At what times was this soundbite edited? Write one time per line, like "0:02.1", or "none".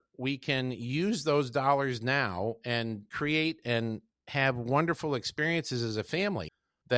none